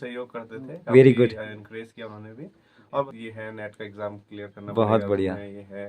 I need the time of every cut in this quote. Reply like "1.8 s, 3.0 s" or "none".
3.0 s